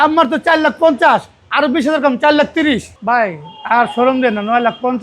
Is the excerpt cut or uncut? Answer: cut